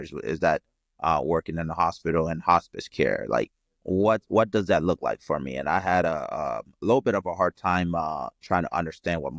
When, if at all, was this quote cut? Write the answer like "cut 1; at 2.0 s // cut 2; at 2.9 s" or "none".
none